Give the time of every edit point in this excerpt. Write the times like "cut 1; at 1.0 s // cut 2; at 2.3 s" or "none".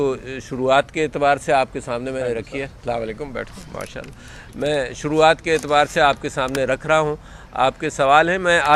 none